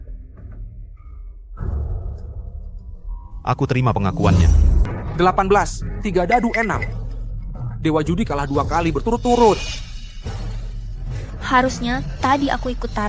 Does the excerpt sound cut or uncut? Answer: cut